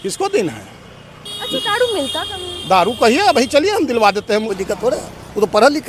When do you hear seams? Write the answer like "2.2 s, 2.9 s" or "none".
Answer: 4.5 s

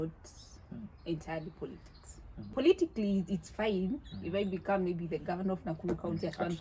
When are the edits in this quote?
2.5 s

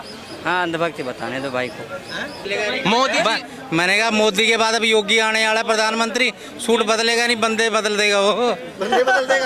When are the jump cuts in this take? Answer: 2.4 s

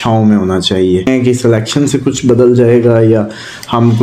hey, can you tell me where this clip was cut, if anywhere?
1.1 s

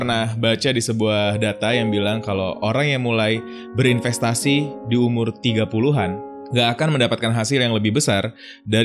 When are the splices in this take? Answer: none

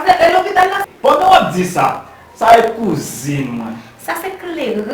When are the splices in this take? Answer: none

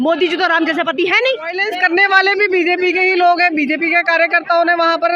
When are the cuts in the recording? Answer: 1.7 s

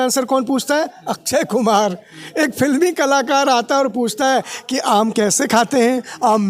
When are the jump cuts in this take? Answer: none

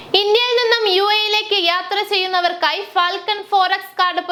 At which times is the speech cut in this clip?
none

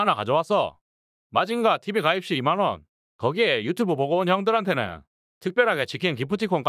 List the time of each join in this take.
1.5 s

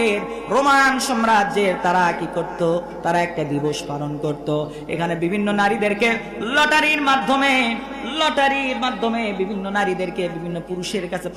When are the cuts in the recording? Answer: none

